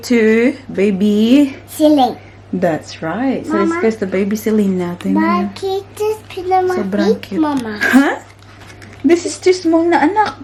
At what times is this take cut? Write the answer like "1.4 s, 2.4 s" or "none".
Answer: none